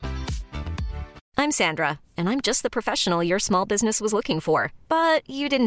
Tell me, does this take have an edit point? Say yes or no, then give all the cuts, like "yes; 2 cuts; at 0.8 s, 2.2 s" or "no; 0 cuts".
yes; 1 cut; at 1.2 s